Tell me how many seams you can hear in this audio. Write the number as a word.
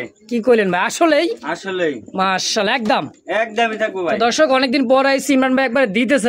zero